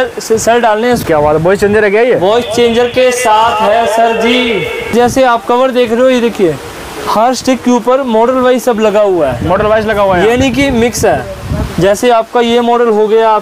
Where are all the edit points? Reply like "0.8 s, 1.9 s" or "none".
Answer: 1.0 s, 4.9 s